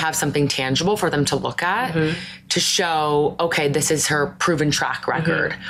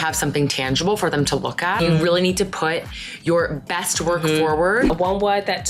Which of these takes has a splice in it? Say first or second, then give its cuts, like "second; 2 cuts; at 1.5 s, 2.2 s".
second; 2 cuts; at 1.8 s, 4.9 s